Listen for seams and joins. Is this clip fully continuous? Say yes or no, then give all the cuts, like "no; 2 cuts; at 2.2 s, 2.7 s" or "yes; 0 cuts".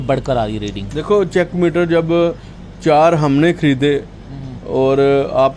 yes; 0 cuts